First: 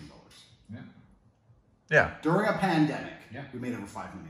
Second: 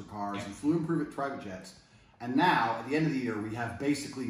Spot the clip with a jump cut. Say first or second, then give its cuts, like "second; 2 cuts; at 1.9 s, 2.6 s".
second; 1 cut; at 2.2 s